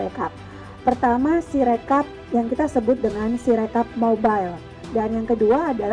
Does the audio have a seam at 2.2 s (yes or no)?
no